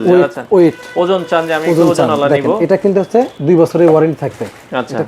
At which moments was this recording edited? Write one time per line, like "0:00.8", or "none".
0:03.3